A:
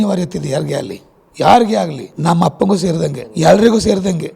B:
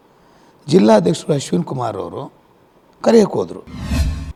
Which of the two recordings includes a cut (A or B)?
A